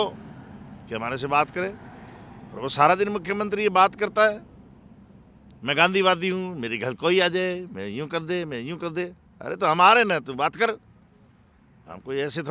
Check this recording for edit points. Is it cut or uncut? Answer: uncut